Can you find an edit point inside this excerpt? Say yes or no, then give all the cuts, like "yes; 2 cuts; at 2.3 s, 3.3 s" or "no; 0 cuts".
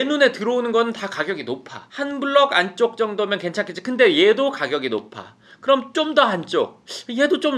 yes; 1 cut; at 2.0 s